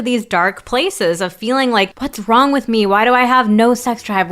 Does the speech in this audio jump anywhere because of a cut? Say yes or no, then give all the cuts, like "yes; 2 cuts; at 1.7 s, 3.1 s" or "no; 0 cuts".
yes; 1 cut; at 2.0 s